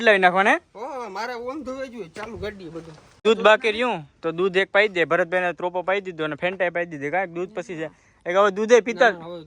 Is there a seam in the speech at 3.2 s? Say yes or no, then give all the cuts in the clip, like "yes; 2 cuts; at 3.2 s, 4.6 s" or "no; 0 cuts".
yes; 1 cut; at 3.2 s